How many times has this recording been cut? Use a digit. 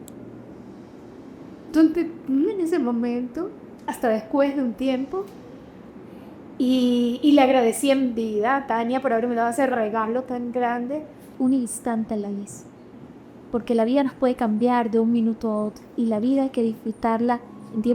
1